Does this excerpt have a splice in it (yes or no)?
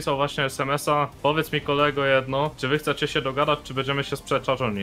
no